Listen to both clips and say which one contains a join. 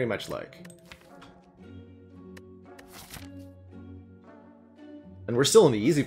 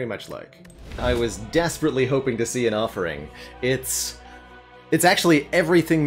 second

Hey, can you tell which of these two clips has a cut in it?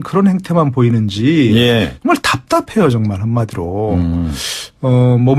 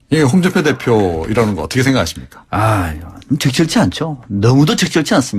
second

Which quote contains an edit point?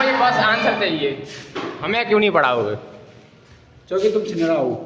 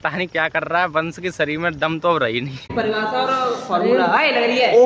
second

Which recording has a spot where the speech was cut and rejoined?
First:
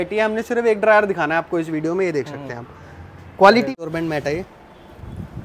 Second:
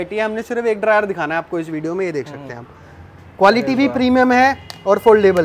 first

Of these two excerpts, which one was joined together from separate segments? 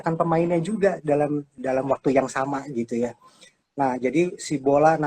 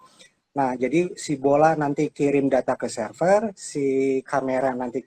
first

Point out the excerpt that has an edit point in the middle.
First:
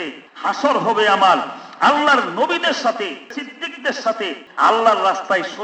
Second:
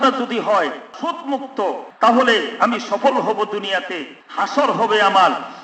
first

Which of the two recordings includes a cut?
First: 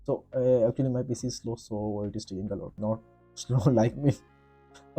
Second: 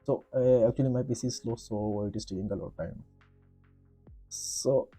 first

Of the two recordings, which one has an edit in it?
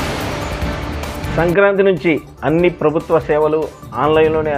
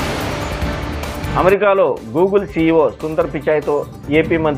first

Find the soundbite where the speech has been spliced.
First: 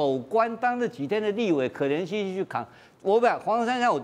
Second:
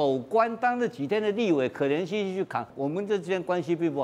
second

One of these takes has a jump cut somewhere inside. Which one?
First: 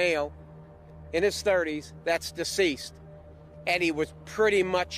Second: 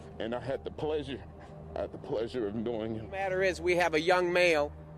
second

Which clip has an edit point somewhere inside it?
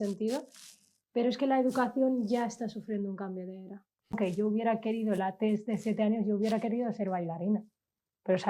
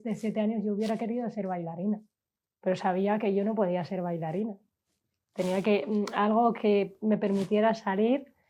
first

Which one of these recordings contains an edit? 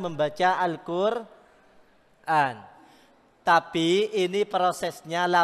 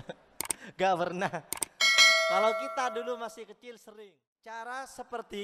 second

